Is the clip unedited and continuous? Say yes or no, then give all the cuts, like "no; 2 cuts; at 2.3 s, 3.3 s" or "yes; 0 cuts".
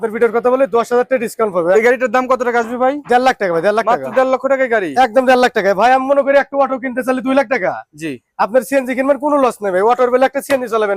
no; 1 cut; at 1.8 s